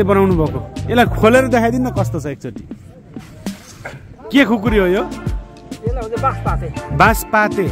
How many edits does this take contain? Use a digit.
0